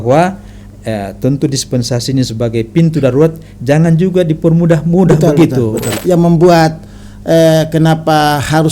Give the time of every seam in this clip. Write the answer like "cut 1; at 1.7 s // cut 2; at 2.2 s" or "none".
cut 1; at 6.0 s